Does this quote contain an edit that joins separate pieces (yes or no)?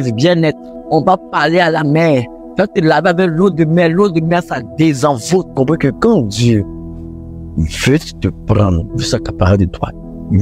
yes